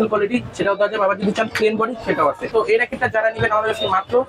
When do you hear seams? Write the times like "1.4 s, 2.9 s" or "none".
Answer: 2.5 s